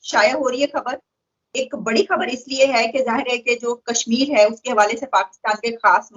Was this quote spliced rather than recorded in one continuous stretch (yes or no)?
no